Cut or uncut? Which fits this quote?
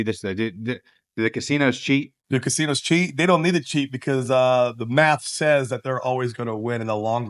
uncut